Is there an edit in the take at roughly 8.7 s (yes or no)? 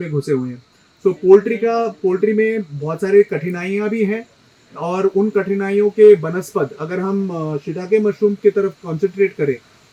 no